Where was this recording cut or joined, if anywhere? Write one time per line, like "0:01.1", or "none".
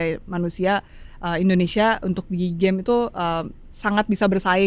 none

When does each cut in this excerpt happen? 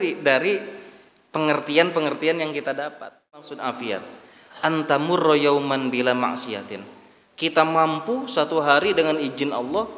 0:03.6

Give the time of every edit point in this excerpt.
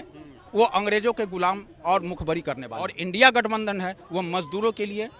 0:03.0

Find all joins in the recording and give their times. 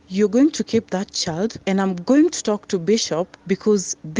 0:01.6
0:03.3

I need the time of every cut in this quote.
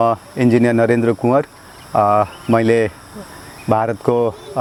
none

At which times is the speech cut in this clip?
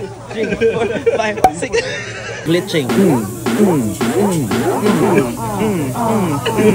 0:05.0

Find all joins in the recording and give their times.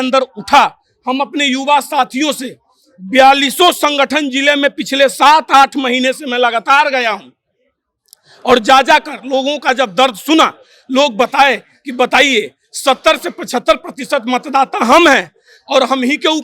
none

